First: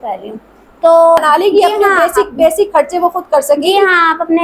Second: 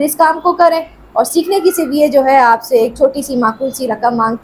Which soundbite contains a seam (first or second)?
first